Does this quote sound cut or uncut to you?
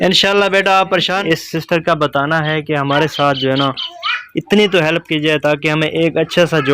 cut